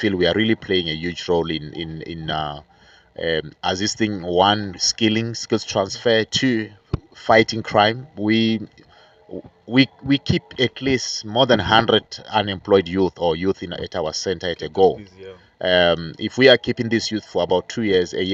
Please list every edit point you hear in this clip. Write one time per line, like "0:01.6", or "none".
none